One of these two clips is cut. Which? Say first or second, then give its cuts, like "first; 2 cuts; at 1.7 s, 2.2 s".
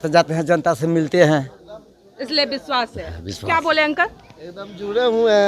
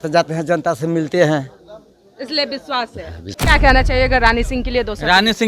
second; 1 cut; at 3.3 s